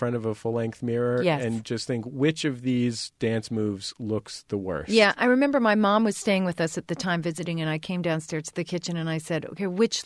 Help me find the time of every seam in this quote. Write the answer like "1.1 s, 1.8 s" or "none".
none